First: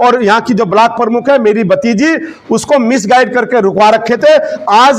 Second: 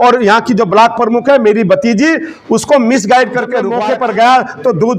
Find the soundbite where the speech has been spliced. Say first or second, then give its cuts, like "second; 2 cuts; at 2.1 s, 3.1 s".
second; 1 cut; at 3.7 s